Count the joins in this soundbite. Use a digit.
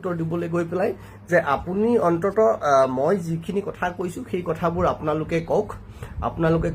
0